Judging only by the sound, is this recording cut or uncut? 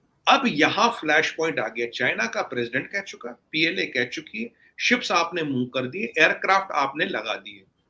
uncut